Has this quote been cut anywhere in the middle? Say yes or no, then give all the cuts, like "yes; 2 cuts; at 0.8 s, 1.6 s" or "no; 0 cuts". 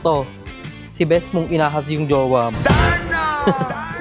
no; 0 cuts